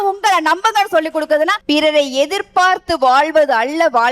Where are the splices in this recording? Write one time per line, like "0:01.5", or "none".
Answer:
0:01.6